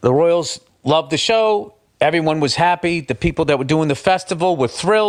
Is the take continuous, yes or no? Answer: yes